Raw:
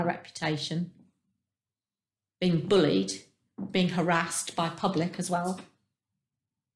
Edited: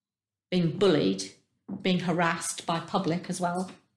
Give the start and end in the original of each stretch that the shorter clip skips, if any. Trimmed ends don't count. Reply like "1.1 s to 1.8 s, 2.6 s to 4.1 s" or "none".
none